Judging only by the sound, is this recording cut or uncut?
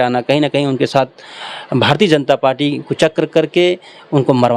uncut